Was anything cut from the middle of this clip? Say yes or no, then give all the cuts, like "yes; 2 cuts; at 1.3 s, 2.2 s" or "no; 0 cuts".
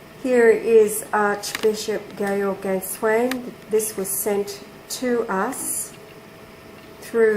no; 0 cuts